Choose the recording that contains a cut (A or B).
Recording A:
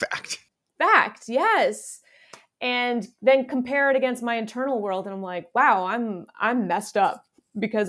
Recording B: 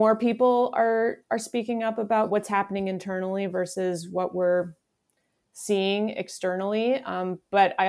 B